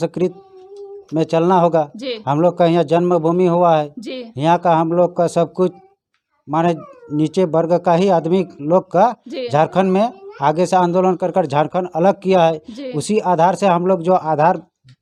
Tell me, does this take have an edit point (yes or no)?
no